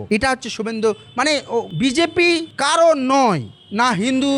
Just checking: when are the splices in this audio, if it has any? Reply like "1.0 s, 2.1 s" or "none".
none